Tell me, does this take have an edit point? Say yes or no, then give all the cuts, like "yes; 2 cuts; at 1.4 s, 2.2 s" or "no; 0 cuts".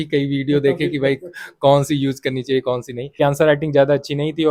yes; 1 cut; at 3.2 s